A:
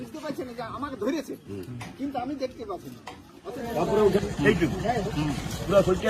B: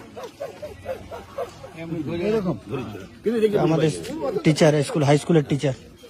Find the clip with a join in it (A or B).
A